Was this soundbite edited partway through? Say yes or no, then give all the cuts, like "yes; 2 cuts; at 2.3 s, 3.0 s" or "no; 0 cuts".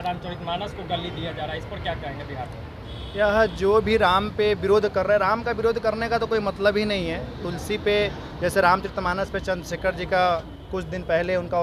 no; 0 cuts